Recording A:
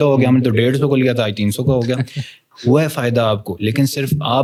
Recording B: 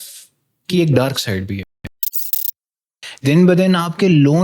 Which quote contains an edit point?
B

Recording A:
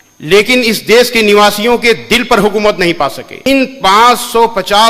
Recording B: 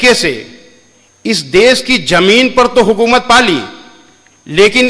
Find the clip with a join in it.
A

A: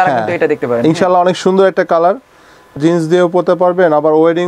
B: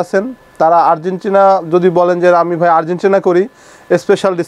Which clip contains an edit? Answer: A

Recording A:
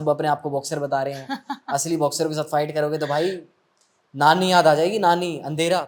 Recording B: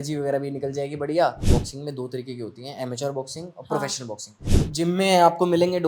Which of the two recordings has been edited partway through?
B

